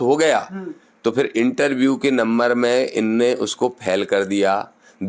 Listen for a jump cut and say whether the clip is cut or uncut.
uncut